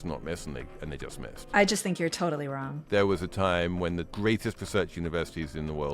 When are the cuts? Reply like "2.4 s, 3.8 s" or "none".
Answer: 2.7 s, 4.1 s